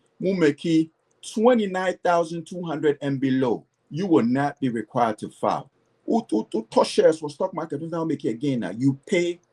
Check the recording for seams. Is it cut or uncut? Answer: cut